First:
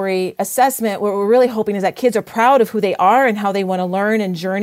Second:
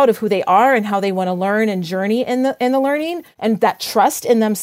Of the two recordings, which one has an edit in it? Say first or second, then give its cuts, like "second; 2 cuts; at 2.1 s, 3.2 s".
second; 1 cut; at 3.3 s